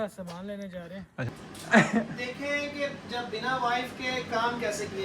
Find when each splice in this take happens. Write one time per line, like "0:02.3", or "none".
0:01.4

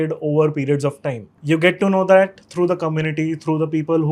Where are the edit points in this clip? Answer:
0:01.3

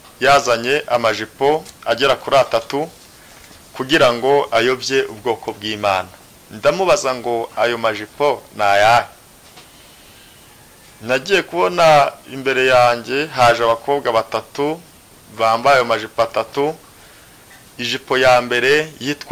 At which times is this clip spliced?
none

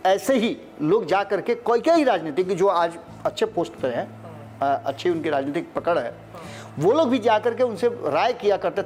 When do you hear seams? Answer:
none

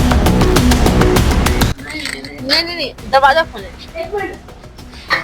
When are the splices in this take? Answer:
0:01.7

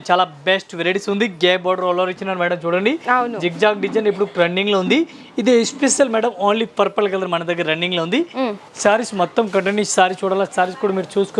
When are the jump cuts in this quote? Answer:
none

